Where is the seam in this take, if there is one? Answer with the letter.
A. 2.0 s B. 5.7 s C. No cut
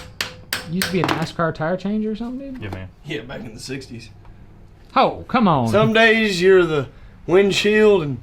B